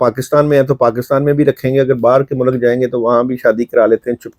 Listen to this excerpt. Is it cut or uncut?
uncut